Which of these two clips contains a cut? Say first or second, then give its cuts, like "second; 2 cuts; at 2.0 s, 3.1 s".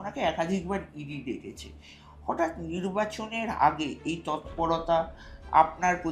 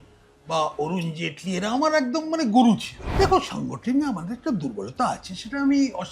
second; 1 cut; at 3.0 s